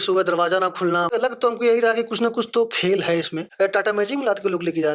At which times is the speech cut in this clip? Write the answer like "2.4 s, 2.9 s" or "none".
1.1 s, 3.4 s